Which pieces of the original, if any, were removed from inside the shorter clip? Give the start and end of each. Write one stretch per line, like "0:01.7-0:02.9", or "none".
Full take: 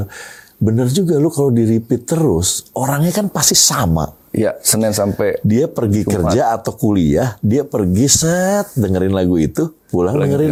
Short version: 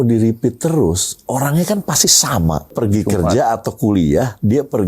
0:04.2-0:05.7